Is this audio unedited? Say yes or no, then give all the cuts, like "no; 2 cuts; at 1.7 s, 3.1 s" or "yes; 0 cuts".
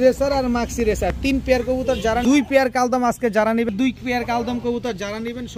no; 2 cuts; at 2.2 s, 3.7 s